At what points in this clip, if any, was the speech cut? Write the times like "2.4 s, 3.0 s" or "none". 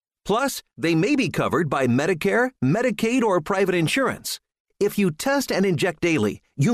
none